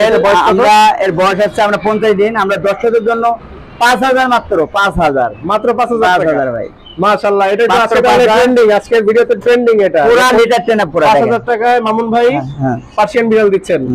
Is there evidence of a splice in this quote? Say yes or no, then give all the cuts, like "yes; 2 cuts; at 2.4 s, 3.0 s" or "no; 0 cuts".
no; 0 cuts